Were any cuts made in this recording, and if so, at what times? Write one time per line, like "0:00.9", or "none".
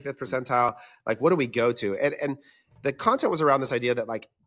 none